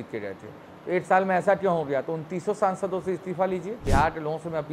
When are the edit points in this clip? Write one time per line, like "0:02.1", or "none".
0:03.8

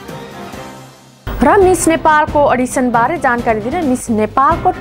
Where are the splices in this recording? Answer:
0:01.1

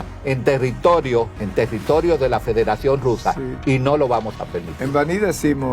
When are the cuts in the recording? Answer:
0:01.4

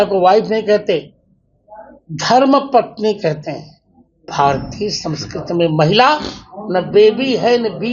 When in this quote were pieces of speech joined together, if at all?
0:04.3

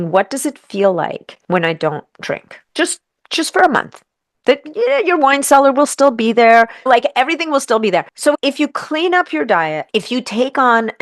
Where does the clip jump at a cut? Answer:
0:01.3
0:02.6
0:06.8
0:08.1
0:09.8

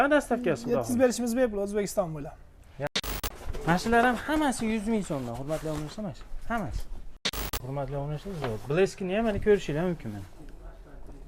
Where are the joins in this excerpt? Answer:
0:02.9
0:07.6

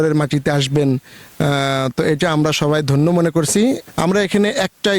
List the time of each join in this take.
0:03.9

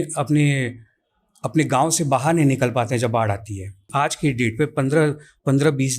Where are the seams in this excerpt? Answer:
0:03.9

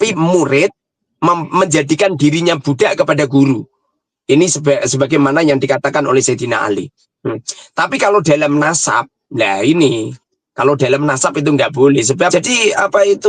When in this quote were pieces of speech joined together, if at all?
0:12.3

